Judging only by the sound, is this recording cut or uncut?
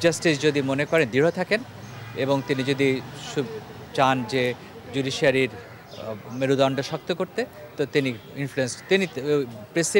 uncut